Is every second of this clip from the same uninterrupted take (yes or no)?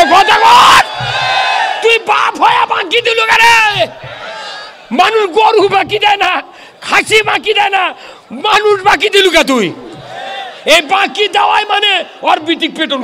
yes